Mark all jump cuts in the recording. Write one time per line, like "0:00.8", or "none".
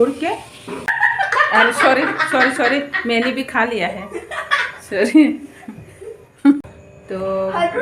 0:00.9
0:06.6